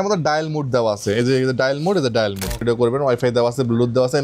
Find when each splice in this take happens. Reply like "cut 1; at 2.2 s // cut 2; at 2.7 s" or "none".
cut 1; at 2.6 s